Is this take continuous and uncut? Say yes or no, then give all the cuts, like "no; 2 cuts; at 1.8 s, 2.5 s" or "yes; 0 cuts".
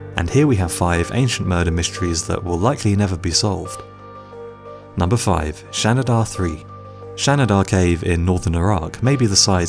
no; 1 cut; at 5.9 s